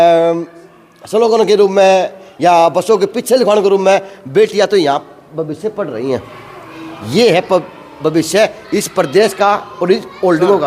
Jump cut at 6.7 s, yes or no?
no